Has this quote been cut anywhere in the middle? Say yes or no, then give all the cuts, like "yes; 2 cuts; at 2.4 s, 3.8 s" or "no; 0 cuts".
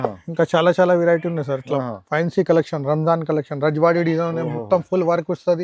no; 0 cuts